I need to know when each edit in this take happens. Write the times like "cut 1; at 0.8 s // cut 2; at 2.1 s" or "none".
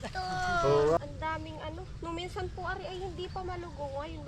cut 1; at 1.0 s